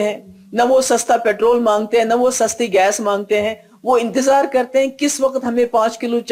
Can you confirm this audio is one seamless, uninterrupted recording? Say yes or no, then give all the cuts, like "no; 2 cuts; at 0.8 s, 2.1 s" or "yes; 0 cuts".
yes; 0 cuts